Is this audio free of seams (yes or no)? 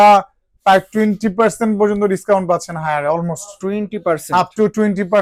yes